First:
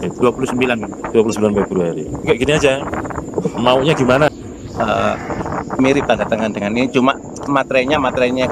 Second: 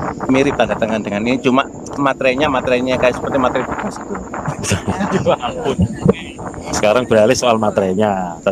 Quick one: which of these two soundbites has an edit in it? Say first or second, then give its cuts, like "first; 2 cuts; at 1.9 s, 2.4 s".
first; 1 cut; at 4.3 s